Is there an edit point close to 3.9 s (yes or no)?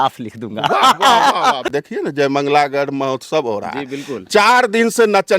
no